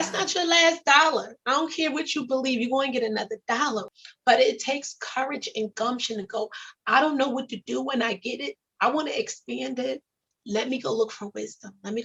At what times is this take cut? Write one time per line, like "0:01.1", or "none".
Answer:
none